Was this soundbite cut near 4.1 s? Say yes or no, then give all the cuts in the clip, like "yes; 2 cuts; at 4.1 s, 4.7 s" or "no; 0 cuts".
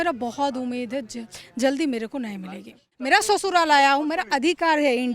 no; 1 cut; at 2.9 s